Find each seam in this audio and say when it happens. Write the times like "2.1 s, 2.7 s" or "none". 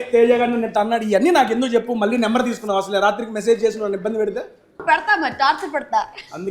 4.8 s

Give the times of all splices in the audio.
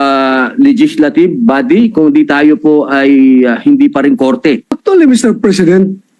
4.8 s

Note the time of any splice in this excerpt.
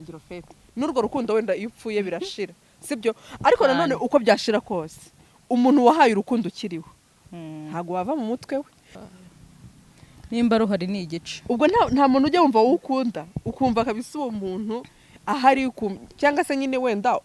8.9 s

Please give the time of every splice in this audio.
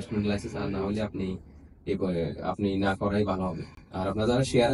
none

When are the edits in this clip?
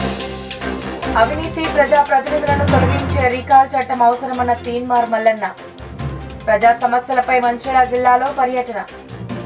1.1 s

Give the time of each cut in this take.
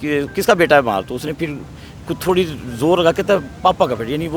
none

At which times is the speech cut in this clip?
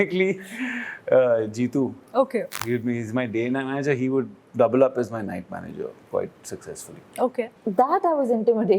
7.5 s

